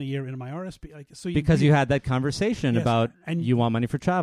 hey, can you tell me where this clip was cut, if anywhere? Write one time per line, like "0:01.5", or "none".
none